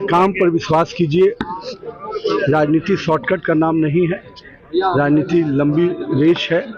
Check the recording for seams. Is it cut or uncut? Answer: uncut